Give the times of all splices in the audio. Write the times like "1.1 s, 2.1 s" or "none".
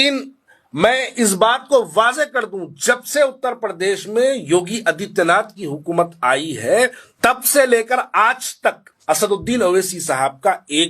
7.0 s, 8.9 s